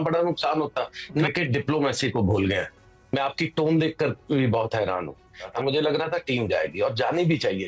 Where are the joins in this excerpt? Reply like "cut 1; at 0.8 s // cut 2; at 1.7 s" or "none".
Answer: cut 1; at 1.3 s // cut 2; at 5.5 s